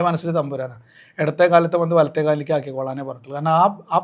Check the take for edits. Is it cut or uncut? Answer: uncut